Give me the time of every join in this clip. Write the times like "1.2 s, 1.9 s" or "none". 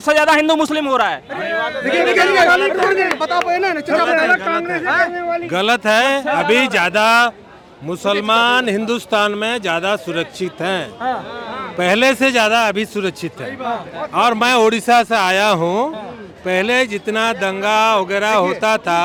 none